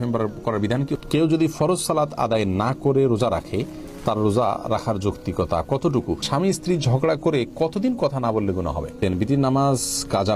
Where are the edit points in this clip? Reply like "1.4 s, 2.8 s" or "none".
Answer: 1.0 s, 6.3 s, 9.0 s